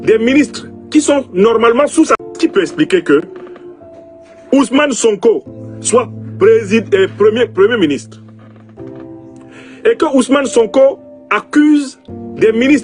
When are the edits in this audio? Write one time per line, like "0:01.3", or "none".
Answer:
0:02.1